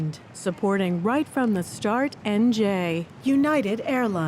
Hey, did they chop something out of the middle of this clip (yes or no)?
yes